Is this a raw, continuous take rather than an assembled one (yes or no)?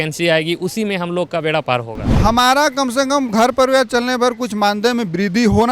no